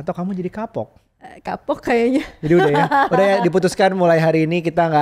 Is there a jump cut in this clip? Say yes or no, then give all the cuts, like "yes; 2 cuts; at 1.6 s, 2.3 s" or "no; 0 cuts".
no; 0 cuts